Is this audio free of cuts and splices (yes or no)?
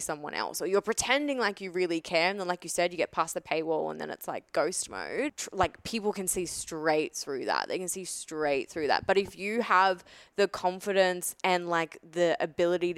no